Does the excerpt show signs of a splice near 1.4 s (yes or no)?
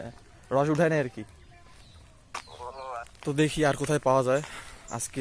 no